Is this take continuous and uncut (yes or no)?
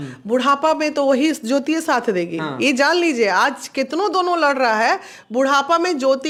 yes